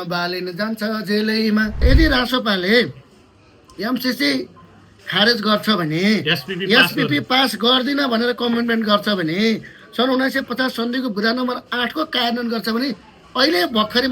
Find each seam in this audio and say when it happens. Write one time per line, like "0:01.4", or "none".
0:01.8